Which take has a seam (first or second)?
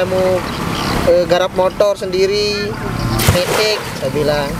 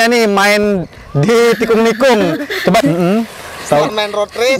second